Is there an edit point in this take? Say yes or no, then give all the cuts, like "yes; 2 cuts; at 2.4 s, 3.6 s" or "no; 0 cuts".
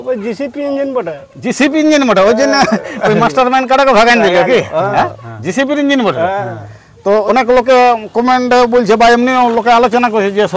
yes; 1 cut; at 7.2 s